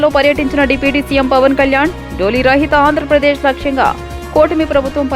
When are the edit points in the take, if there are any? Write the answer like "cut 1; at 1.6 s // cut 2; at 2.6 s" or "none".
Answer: none